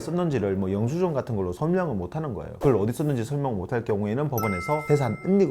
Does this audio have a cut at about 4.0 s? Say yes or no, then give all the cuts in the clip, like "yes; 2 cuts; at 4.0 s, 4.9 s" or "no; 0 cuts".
no; 1 cut; at 2.6 s